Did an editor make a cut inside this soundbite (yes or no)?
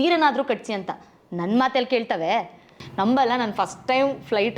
yes